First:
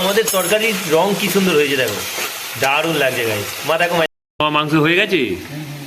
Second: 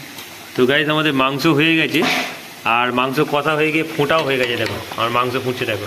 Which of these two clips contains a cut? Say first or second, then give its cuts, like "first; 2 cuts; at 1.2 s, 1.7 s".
first; 1 cut; at 4.1 s